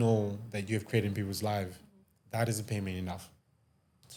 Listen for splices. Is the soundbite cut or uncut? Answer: uncut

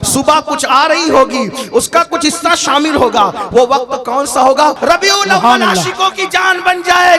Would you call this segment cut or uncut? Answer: cut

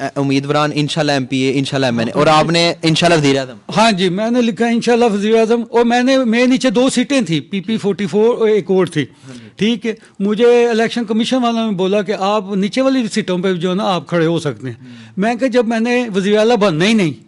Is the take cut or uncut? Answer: uncut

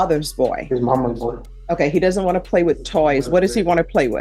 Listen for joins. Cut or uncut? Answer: cut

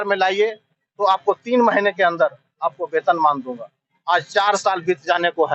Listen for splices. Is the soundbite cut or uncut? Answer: uncut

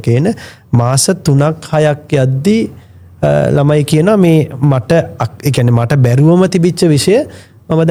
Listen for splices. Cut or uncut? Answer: uncut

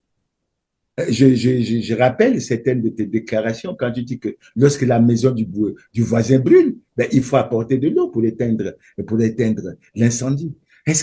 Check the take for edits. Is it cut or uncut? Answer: uncut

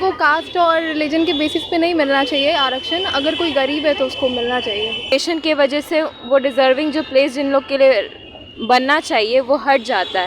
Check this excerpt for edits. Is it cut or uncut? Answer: cut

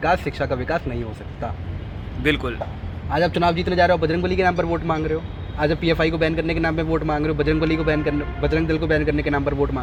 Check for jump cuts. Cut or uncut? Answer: uncut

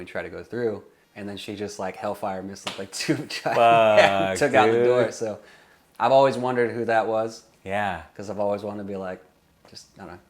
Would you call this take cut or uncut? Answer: cut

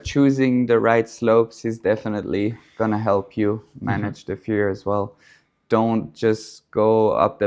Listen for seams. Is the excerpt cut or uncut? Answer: uncut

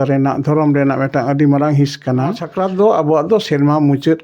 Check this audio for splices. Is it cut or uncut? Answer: cut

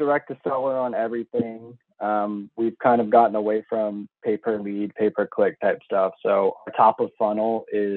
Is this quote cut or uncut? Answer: uncut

